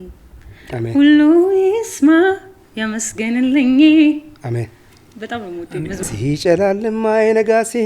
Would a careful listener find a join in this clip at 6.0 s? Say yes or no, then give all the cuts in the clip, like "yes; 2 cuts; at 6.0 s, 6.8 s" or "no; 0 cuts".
yes; 1 cut; at 6.0 s